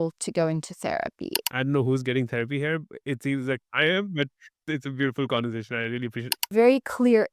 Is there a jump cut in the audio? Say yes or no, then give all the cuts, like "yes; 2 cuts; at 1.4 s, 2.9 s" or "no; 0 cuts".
yes; 3 cuts; at 1.3 s, 4.6 s, 6.4 s